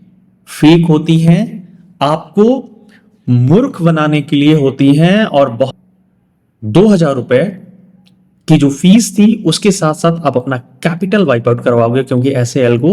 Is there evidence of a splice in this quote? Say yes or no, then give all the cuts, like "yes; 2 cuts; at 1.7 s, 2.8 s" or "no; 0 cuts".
yes; 1 cut; at 5.7 s